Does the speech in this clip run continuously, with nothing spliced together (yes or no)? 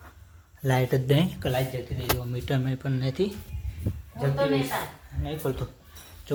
yes